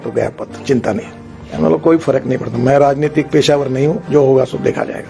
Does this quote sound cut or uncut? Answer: cut